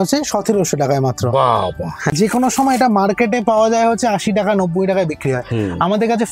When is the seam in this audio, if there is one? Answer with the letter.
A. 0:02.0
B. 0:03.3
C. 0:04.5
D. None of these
A